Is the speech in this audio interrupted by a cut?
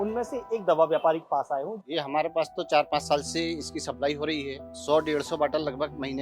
yes; 2 cuts; at 1.8 s, 4.7 s

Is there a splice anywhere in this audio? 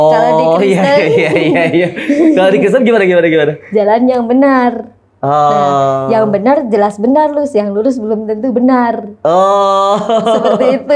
no; 0 cuts

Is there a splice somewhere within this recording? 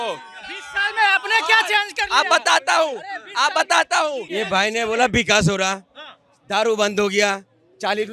yes; 1 cut; at 4.3 s

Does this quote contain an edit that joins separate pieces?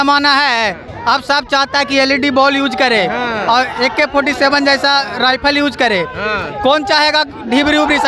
no; 0 cuts

